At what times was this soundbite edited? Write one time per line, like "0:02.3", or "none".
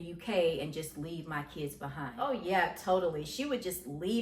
0:02.2